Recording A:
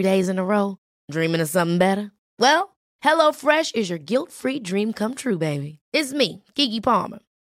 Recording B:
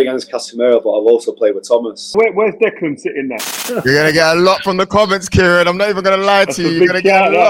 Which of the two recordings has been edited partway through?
B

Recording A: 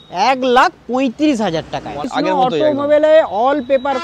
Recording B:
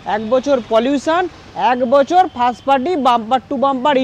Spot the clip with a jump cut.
A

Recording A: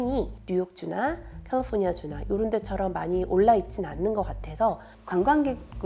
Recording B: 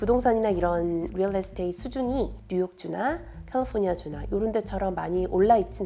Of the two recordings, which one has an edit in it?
A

